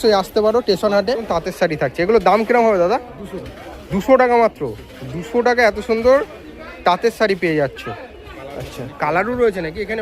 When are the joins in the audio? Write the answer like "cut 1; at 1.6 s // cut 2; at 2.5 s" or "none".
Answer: cut 1; at 1.2 s